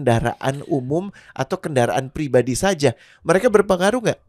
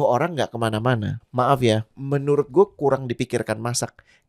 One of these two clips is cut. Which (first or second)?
second